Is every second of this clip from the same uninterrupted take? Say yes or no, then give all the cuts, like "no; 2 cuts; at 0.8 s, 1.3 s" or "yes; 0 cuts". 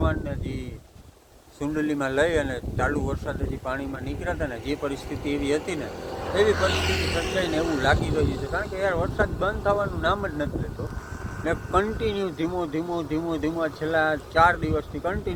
yes; 0 cuts